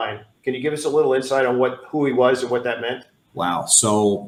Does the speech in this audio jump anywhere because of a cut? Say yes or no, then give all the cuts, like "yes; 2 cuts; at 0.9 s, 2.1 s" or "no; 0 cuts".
no; 0 cuts